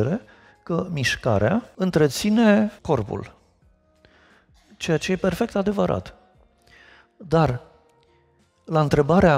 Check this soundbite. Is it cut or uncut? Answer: cut